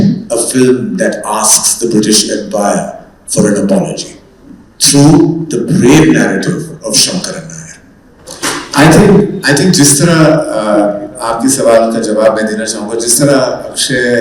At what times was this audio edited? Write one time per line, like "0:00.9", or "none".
none